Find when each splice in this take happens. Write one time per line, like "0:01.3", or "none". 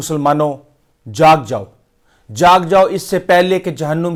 none